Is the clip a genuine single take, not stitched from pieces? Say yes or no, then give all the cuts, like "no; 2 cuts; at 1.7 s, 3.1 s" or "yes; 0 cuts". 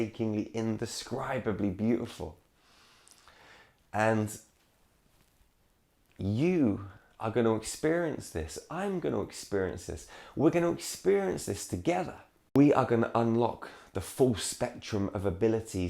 no; 1 cut; at 12.6 s